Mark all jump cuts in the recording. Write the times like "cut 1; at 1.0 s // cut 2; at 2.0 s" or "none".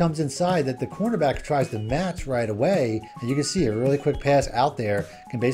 cut 1; at 3.1 s